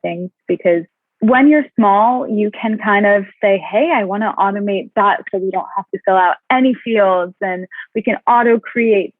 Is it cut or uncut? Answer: cut